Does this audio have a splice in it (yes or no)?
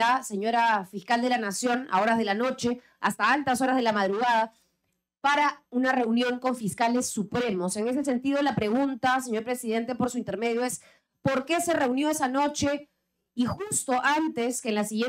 no